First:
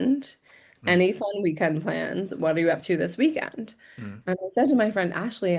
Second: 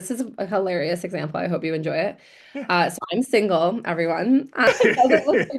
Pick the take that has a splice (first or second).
second